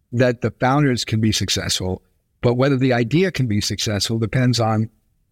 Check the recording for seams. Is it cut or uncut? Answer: uncut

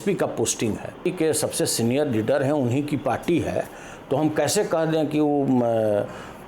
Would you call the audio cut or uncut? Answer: cut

